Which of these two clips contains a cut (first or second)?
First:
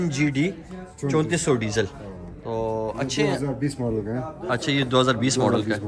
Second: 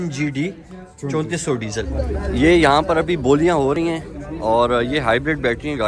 second